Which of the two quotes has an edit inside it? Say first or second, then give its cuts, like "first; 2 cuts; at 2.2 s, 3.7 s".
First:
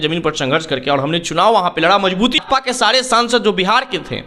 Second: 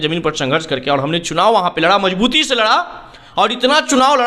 first; 1 cut; at 2.4 s